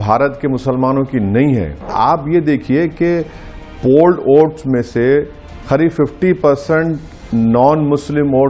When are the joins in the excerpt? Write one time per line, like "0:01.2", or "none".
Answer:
0:01.9